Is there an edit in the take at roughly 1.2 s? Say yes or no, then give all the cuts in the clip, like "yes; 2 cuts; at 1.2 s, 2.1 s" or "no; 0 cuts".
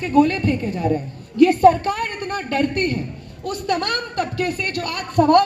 yes; 1 cut; at 1.2 s